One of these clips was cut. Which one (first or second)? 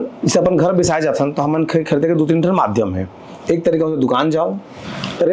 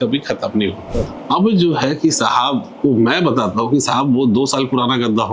second